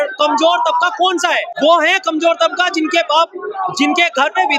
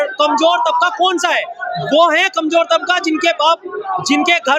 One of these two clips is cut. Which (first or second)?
first